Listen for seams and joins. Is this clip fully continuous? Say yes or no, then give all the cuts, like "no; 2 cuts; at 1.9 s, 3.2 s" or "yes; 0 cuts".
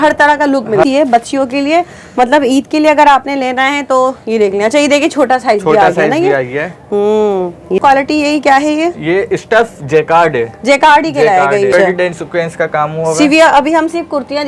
no; 3 cuts; at 0.8 s, 7.8 s, 11.7 s